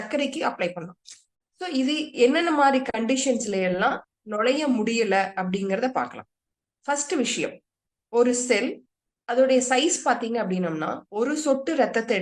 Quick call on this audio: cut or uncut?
cut